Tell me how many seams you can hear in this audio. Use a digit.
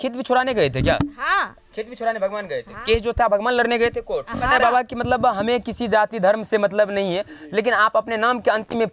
1